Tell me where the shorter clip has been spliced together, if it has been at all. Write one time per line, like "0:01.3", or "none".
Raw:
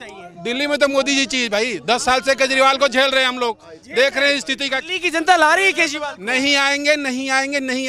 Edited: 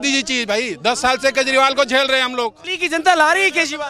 0:02.7